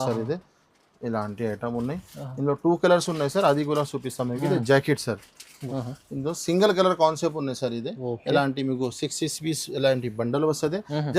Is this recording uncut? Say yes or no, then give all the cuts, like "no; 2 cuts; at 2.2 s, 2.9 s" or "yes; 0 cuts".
no; 1 cut; at 5.6 s